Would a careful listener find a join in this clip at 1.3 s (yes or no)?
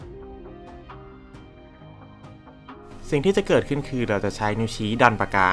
no